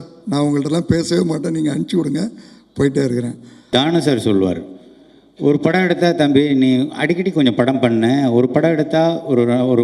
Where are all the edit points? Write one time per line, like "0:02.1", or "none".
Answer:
0:03.7